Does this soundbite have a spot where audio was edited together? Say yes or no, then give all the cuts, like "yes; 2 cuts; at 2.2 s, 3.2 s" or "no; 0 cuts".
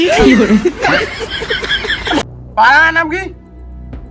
yes; 1 cut; at 2.2 s